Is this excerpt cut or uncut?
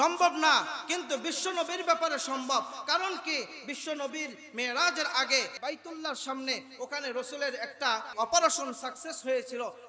cut